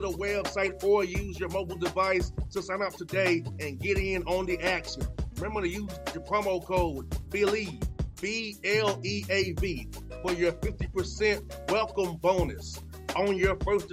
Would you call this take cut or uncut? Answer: uncut